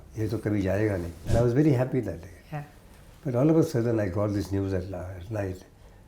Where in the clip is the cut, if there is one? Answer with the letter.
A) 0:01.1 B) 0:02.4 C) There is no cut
A